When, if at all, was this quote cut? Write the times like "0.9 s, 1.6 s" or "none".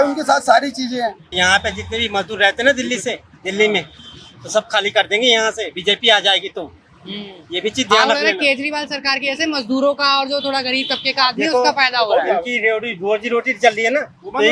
1.2 s